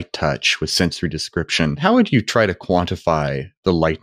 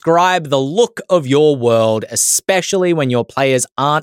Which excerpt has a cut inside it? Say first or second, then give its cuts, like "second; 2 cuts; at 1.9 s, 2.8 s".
first; 1 cut; at 1.8 s